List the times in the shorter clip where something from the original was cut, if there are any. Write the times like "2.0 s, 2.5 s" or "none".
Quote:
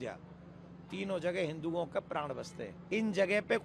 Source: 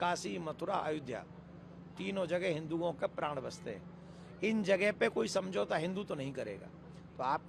2.7 s